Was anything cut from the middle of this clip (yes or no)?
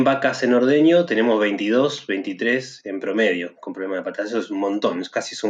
no